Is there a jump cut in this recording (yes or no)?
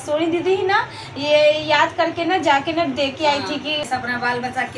yes